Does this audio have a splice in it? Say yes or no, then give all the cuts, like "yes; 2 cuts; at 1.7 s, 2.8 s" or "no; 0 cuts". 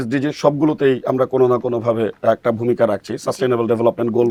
no; 0 cuts